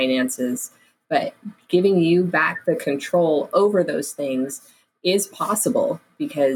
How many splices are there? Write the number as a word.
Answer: zero